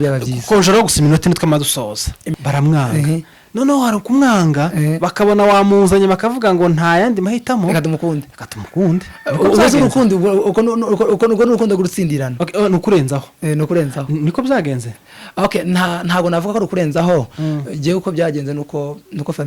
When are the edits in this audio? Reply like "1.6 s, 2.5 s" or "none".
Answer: 2.3 s